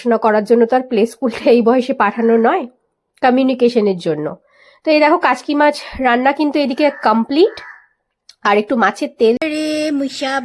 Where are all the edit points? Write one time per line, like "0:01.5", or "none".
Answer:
0:09.4

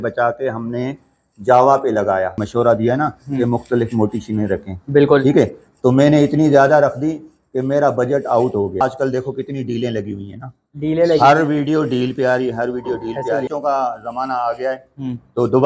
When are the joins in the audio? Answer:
0:02.4
0:08.8
0:13.5

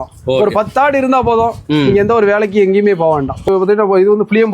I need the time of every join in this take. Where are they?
0:03.5

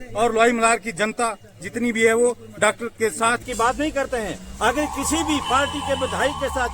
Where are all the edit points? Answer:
0:03.4

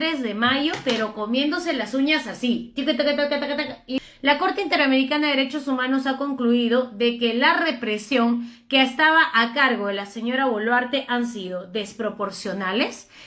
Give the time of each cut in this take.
0:04.0

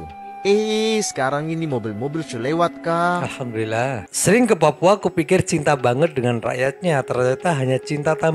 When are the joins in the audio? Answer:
0:04.0

